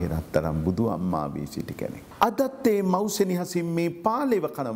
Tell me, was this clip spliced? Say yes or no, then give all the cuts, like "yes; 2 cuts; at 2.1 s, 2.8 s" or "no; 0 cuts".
yes; 1 cut; at 2.1 s